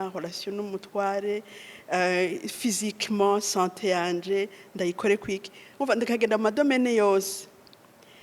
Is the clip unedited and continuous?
yes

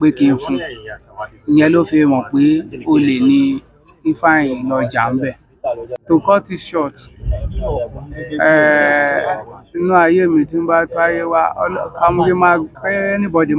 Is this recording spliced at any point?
yes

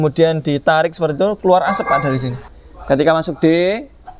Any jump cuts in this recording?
yes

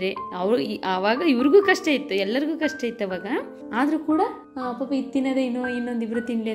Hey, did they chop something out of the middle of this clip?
no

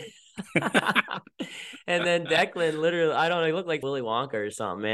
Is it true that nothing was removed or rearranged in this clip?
no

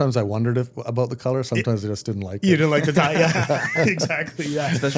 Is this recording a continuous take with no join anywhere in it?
yes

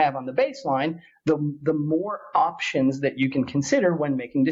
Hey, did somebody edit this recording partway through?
no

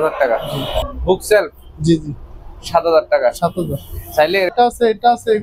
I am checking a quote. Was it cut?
yes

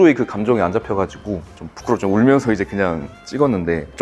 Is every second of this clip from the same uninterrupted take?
yes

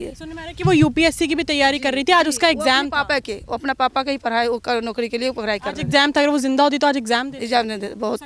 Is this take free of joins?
yes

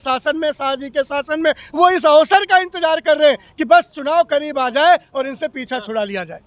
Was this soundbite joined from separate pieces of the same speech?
no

